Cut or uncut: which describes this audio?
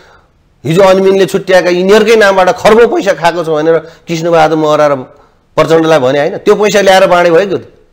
uncut